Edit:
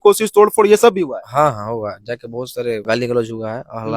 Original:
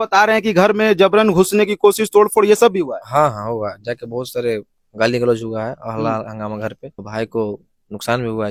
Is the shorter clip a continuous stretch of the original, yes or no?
no